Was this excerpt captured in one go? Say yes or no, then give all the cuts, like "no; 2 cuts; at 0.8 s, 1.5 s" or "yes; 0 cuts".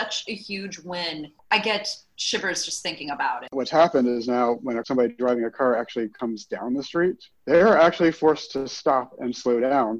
no; 5 cuts; at 1.5 s, 3.5 s, 4.8 s, 6.1 s, 7.3 s